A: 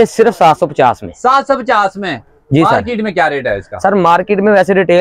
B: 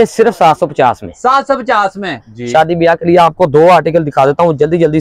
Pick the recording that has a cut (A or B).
B